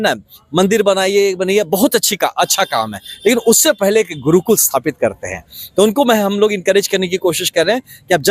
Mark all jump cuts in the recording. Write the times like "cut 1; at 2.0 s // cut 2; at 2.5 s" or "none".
none